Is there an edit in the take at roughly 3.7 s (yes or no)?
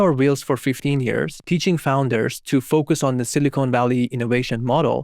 no